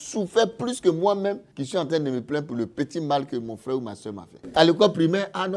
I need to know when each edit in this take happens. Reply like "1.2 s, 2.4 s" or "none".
1.5 s, 4.4 s